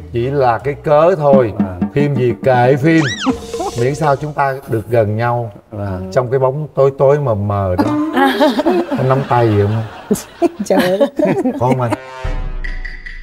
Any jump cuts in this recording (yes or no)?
no